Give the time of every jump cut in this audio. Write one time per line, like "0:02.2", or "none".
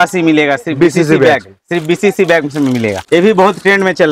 0:03.2